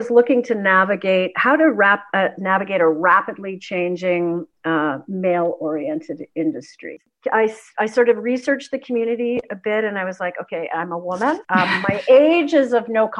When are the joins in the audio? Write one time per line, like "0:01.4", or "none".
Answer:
0:07.0
0:11.4